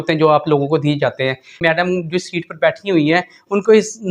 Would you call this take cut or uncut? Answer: cut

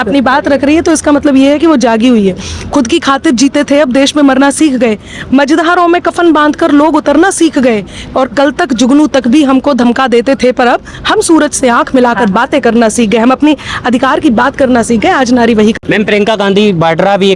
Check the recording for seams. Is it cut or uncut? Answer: uncut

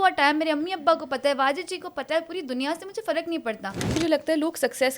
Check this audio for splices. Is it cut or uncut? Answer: cut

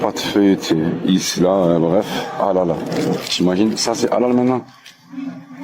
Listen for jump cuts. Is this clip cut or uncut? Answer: uncut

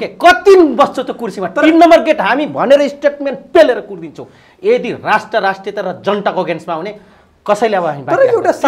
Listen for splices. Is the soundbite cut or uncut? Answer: uncut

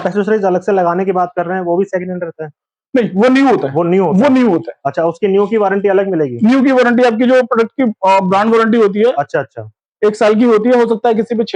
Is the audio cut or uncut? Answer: uncut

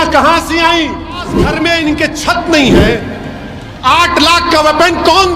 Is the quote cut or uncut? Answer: cut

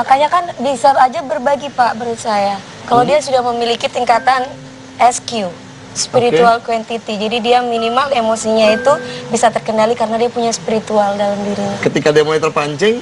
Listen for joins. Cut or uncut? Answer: uncut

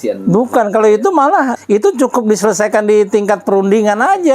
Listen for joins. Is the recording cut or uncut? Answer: cut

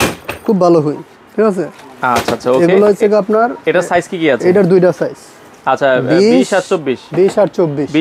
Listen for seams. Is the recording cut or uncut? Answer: uncut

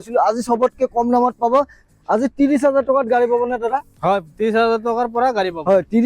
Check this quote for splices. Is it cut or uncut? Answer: cut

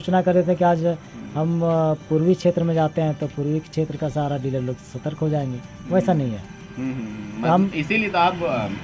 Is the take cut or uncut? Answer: uncut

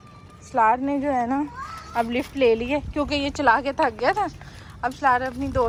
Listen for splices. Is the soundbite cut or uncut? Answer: uncut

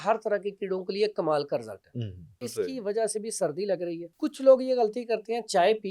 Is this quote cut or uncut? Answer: cut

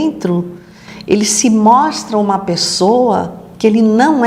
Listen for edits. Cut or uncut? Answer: uncut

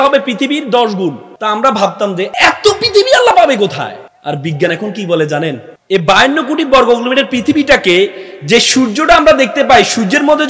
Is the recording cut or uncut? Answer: cut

